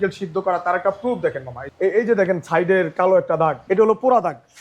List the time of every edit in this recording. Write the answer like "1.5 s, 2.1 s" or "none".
1.6 s, 3.6 s